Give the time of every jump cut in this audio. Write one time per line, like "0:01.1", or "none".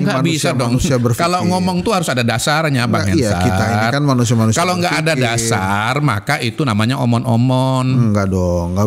none